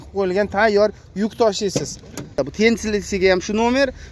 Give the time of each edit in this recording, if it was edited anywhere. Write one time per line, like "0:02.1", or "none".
0:02.3